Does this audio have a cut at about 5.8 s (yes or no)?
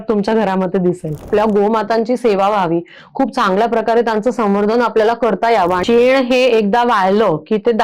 yes